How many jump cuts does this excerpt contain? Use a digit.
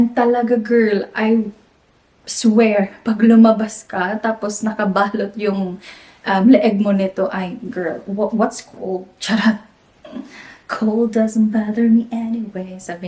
0